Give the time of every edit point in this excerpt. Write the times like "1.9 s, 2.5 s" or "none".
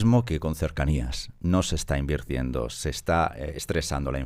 none